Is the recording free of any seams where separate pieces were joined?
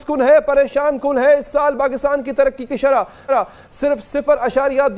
yes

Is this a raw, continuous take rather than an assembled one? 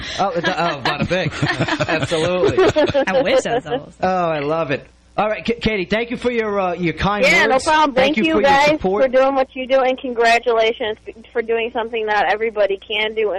no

